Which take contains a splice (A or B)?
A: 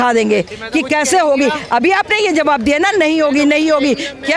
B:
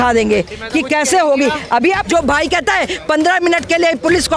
B